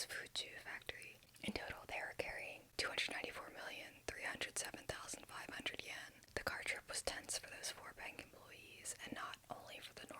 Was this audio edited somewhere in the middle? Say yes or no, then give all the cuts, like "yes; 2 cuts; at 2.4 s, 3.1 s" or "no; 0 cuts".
yes; 3 cuts; at 1.2 s, 2.6 s, 6.2 s